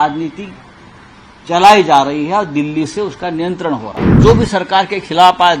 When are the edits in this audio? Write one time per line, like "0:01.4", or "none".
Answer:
0:04.1